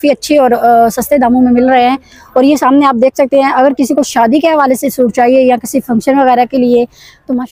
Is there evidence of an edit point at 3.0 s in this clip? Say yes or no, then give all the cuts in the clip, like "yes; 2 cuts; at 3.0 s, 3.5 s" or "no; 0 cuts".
no; 0 cuts